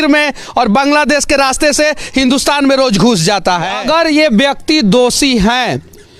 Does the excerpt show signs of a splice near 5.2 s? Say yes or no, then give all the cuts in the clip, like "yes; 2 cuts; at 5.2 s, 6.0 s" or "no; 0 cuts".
no; 1 cut; at 3.8 s